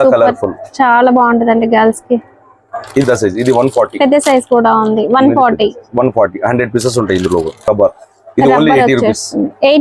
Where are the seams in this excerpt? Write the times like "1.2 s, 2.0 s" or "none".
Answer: none